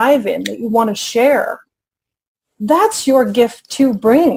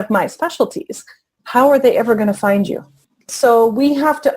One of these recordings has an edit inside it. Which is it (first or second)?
second